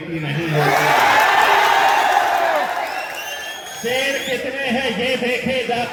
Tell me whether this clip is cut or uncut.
uncut